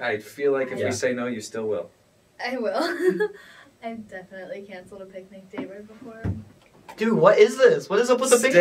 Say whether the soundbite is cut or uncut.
uncut